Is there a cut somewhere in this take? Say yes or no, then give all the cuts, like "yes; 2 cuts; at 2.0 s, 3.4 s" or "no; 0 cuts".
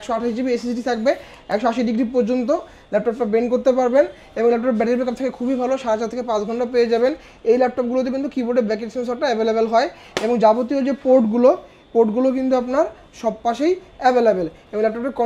no; 0 cuts